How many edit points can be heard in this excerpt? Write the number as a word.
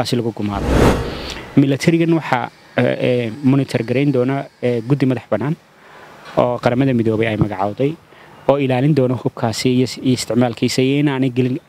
one